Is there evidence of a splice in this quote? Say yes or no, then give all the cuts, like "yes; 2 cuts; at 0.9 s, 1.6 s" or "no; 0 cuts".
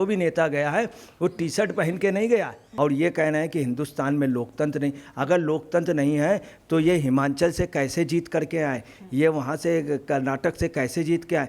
yes; 1 cut; at 2.6 s